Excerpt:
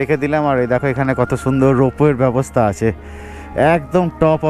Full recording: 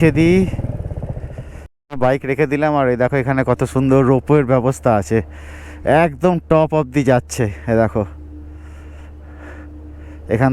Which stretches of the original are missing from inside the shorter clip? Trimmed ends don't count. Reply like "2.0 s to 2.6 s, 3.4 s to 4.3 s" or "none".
none